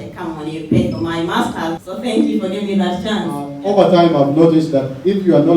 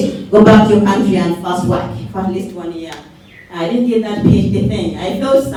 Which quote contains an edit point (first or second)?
first